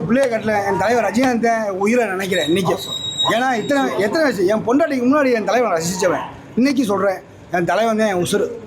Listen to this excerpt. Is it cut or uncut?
uncut